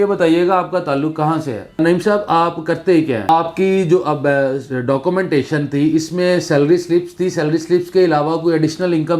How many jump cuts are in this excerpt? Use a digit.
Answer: 2